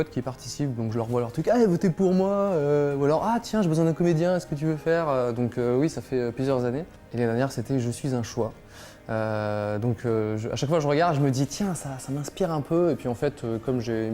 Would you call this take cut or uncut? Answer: cut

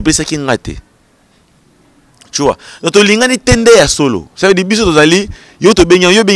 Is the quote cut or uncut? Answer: uncut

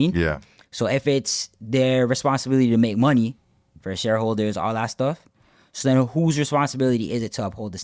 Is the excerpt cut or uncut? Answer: uncut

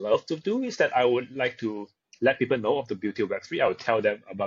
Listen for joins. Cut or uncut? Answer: uncut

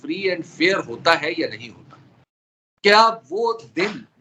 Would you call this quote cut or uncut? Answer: uncut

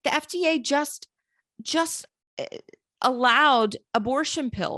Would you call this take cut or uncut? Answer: uncut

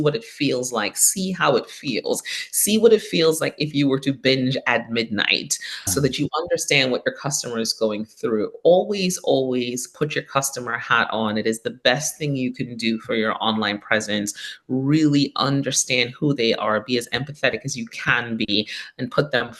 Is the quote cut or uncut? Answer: uncut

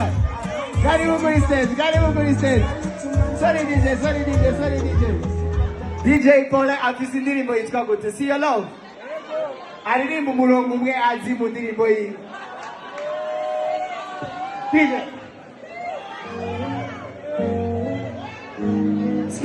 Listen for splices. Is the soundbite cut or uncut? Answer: cut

